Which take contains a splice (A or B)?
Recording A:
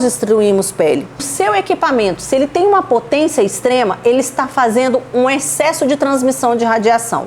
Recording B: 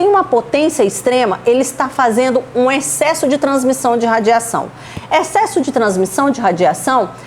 A